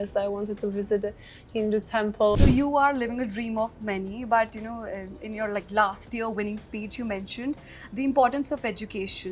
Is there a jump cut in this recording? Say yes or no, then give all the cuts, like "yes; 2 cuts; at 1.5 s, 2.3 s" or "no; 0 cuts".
yes; 1 cut; at 2.3 s